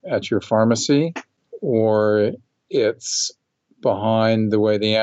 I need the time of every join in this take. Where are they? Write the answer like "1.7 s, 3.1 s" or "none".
none